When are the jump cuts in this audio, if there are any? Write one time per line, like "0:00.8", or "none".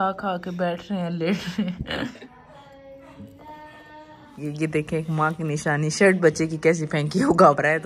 0:02.2
0:04.3